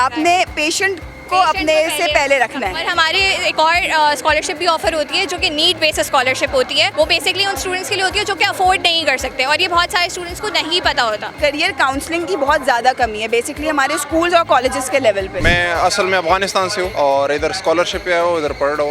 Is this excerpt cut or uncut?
cut